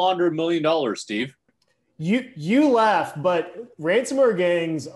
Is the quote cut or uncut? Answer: cut